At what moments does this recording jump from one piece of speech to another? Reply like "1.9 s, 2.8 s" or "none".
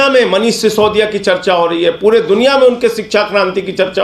none

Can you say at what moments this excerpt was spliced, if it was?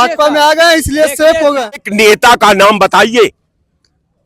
1.9 s

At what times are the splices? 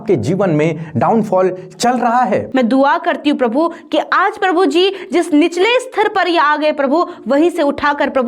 2.5 s

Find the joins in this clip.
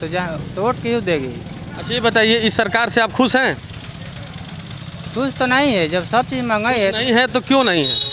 none

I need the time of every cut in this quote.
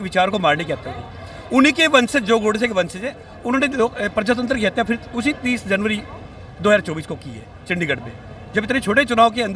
none

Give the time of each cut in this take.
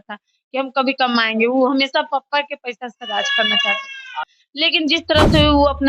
4.4 s

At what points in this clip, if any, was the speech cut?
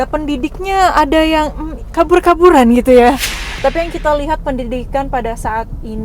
3.5 s

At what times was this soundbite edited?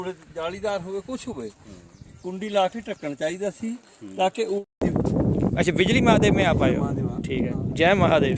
4.6 s

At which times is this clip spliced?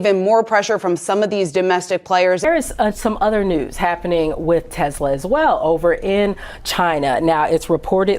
2.5 s

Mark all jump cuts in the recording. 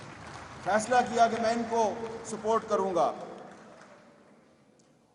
none

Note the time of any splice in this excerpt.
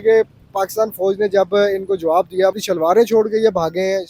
2.5 s

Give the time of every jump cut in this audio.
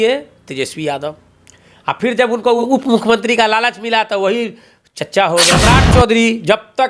2.6 s, 5.7 s

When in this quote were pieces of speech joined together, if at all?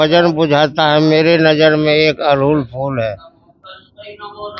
none

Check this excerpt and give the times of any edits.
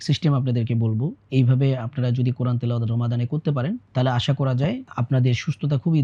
3.9 s, 4.9 s

